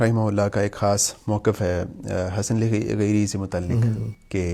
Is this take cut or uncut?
uncut